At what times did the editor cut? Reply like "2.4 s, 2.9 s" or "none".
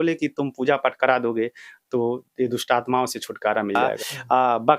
3.9 s